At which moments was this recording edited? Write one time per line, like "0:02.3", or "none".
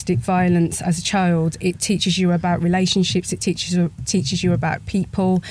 none